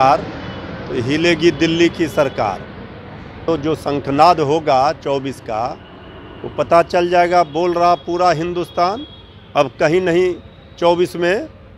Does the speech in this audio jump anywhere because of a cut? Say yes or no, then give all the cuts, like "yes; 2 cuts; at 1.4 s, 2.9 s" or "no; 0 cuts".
yes; 1 cut; at 3.4 s